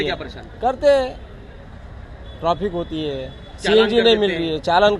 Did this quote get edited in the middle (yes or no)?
no